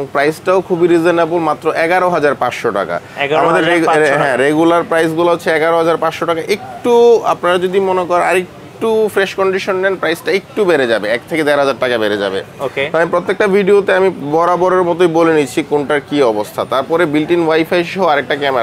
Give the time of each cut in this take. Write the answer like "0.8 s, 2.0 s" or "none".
none